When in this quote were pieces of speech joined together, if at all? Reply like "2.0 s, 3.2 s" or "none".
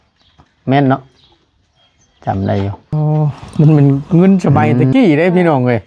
2.9 s